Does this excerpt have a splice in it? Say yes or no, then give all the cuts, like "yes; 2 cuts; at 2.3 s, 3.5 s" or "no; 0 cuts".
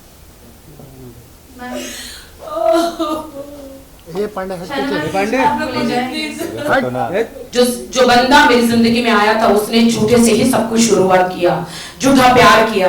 yes; 1 cut; at 7.4 s